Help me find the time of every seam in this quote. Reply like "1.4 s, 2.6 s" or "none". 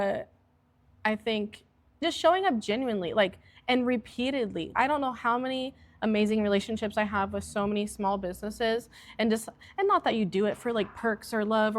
2.0 s, 4.7 s